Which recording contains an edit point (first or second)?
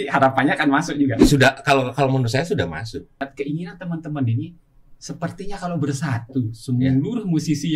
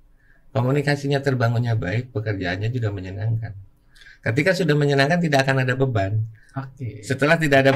first